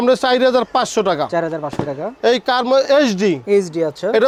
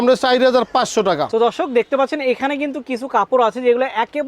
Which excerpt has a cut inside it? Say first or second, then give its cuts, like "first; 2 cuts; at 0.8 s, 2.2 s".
second; 1 cut; at 1.3 s